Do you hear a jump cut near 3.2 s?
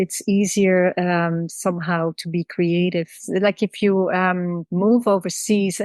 yes; 1 cut; at 3.2 s

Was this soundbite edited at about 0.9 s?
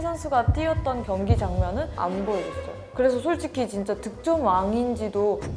no; 1 cut; at 2.7 s

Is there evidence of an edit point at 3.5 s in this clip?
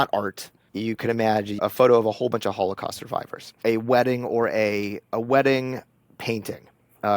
yes; 2 cuts; at 1.6 s, 3.5 s

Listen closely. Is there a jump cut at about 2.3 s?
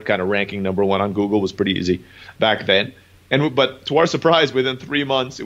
no; 0 cuts

